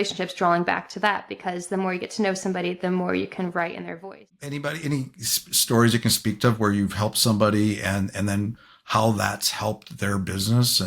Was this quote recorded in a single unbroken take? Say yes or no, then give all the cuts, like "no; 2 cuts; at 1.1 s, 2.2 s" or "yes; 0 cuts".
no; 1 cut; at 4.0 s